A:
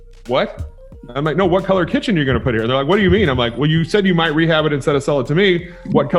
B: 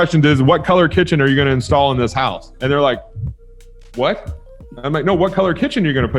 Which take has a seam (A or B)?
B